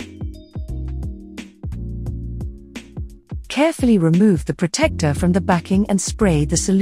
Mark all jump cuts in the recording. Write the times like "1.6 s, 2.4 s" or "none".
2.4 s, 3.5 s

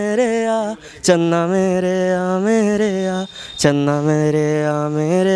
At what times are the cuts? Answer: none

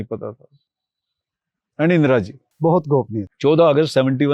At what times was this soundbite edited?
3.2 s

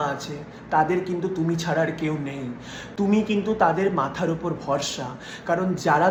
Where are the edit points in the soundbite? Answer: none

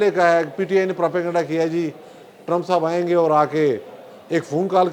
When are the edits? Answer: none

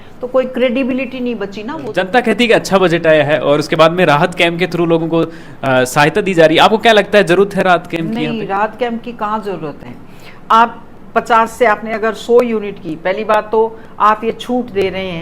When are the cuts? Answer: 1.9 s

